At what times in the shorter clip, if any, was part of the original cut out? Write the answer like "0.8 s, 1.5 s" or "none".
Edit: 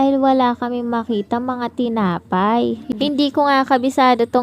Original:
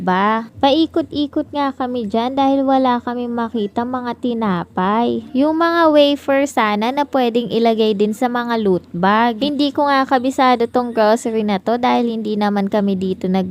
2.9 s